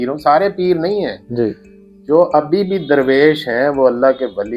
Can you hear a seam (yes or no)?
no